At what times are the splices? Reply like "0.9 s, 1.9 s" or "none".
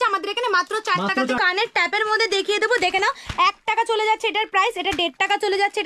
1.4 s